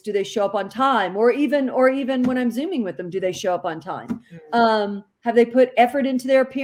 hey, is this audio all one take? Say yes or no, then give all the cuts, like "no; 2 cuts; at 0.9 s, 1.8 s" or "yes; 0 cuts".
yes; 0 cuts